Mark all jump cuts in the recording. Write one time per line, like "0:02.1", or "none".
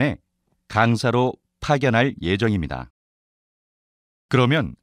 0:01.5